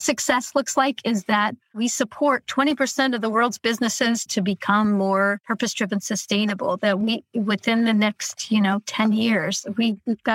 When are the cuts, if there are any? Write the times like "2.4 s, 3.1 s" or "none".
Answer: none